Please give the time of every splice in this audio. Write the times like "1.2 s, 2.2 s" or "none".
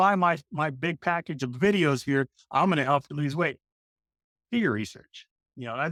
none